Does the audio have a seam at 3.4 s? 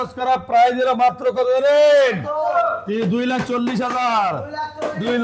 no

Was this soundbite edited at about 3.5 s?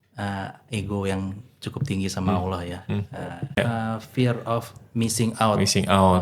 yes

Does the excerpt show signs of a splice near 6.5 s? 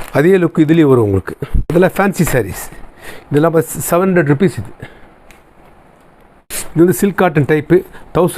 yes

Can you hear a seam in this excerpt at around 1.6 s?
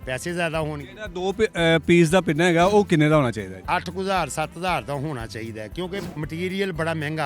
no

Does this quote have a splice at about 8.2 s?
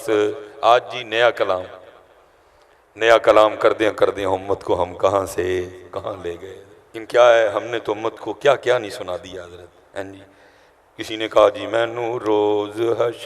no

